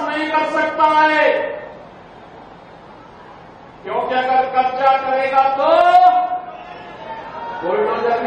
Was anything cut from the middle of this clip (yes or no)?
no